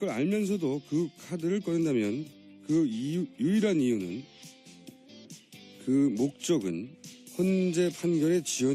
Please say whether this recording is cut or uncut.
cut